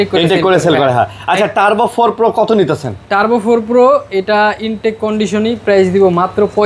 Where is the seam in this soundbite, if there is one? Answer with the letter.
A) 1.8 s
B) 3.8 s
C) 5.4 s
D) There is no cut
D